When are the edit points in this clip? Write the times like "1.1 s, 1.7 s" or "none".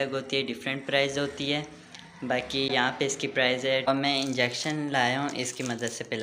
2.7 s, 3.9 s